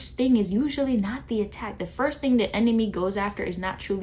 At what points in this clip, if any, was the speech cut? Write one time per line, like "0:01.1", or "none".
none

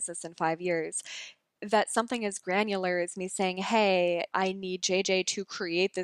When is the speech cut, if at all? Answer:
none

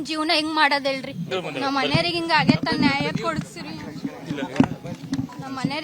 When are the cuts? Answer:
0:01.2

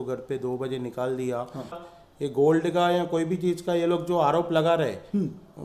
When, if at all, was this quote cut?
0:01.9

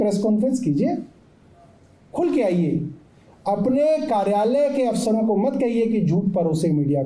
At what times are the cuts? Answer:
none

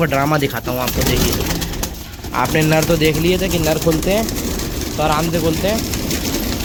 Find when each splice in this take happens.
none

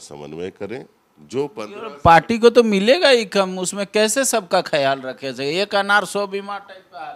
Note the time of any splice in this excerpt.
none

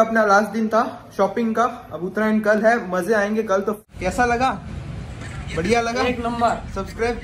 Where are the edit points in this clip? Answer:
0:03.8

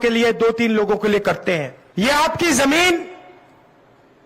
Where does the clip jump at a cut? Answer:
0:01.8

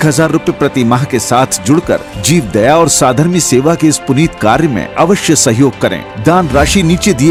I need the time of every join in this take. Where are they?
none

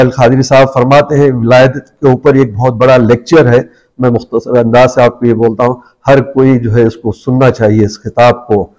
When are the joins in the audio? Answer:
none

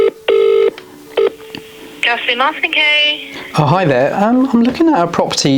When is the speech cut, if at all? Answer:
0:00.9

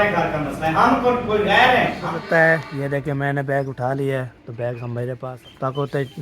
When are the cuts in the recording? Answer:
0:02.1
0:05.3

